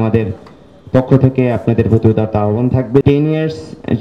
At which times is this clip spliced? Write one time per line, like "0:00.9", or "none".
0:03.0